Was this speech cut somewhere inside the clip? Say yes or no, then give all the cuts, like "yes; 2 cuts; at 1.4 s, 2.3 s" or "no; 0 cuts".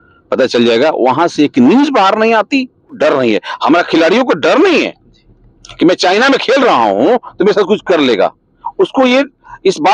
yes; 1 cut; at 3.0 s